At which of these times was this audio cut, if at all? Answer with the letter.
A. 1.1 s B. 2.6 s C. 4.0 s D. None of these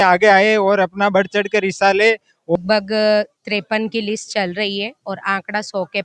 B